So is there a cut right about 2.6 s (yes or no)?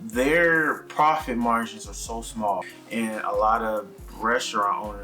yes